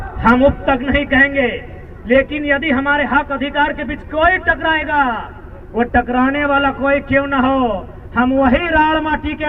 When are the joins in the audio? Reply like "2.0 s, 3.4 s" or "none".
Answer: none